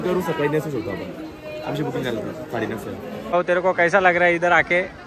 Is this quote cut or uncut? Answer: cut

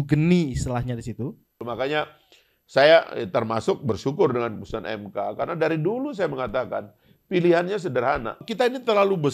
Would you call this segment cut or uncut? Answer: cut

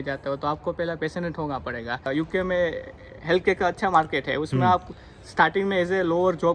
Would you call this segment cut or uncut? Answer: cut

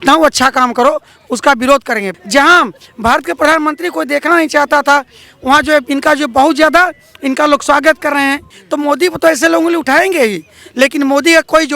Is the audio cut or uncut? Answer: cut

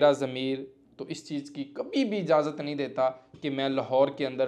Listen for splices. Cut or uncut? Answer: uncut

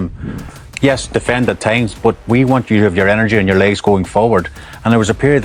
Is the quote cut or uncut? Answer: uncut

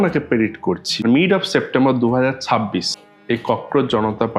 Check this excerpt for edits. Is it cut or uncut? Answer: cut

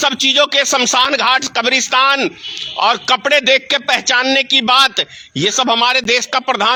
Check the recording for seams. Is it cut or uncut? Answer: uncut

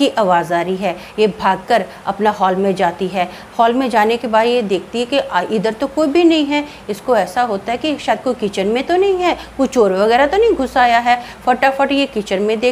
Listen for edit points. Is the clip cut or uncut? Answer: uncut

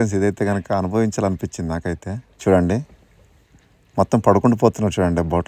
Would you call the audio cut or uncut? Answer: uncut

